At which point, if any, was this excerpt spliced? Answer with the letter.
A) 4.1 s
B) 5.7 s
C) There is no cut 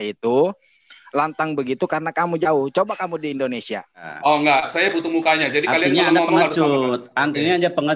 A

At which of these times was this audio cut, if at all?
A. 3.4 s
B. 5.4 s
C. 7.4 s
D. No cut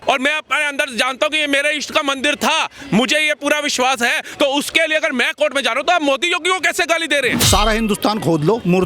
C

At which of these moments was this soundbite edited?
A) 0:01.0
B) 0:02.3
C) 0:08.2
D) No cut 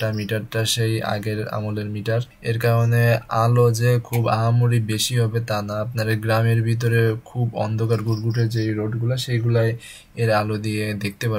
B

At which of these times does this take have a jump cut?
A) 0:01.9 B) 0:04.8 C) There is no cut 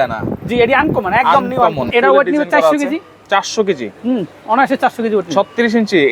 A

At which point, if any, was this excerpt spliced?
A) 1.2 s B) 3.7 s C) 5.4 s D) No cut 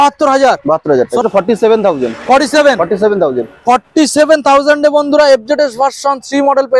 A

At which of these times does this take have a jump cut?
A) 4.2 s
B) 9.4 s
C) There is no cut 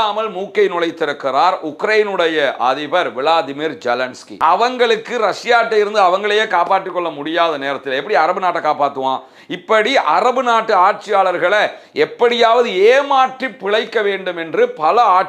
A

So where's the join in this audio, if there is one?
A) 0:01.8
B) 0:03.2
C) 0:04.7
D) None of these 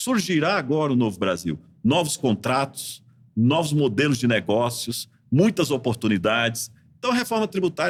D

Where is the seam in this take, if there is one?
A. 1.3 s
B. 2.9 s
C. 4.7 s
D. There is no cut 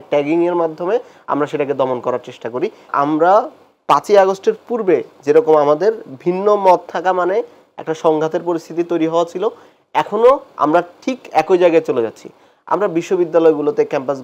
B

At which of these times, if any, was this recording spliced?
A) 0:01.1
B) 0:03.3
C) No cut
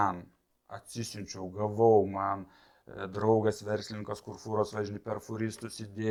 C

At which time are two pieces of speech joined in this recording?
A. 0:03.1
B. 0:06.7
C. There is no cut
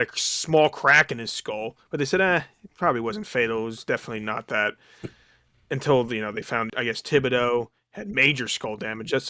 B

